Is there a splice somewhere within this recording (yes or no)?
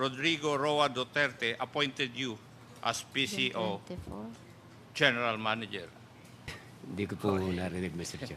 yes